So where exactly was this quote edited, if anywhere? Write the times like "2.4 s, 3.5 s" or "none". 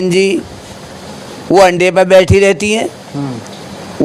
none